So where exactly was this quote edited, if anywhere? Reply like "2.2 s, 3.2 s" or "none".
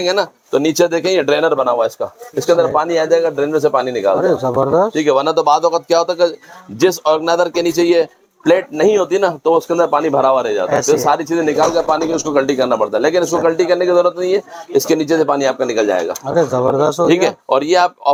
none